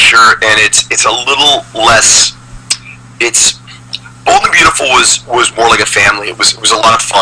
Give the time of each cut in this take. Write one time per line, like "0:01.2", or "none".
0:05.5